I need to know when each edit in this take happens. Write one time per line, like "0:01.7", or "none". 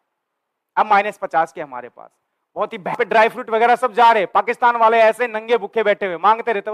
0:03.0

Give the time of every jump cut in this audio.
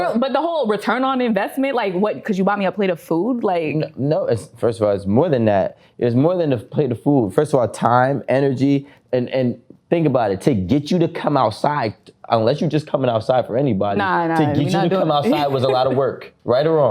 none

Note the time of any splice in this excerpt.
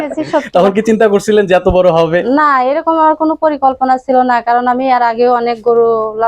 none

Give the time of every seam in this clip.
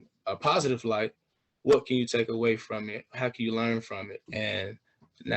0:04.2

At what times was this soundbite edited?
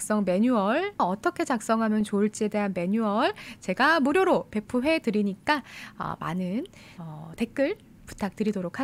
0:01.0

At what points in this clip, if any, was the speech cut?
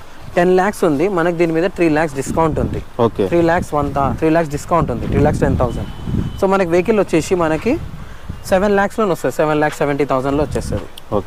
none

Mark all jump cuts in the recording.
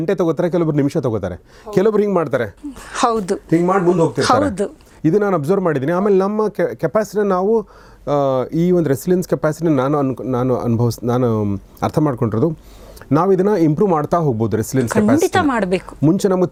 none

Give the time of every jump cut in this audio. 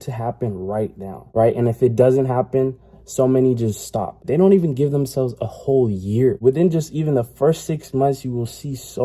0:01.2
0:04.2
0:06.4

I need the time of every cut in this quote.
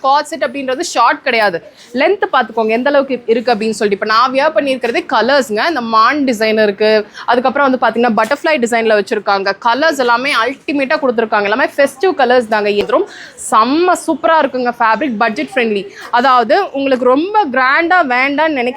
0:12.8

